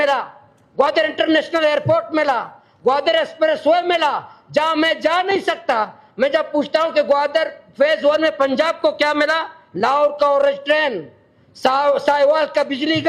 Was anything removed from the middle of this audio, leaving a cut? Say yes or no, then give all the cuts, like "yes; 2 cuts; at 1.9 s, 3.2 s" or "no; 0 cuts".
no; 0 cuts